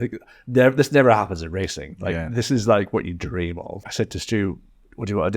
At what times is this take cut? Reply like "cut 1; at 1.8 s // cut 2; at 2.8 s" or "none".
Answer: cut 1; at 3.8 s